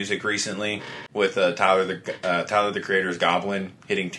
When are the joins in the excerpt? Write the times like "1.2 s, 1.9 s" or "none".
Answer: 1.0 s